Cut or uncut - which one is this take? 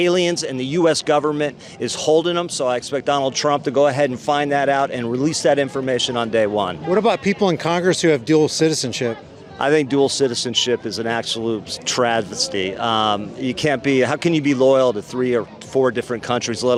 uncut